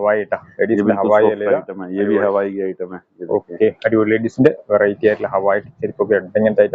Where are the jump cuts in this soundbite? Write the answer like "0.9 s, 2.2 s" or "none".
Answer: none